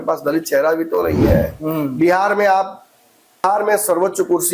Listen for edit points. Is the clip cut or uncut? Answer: cut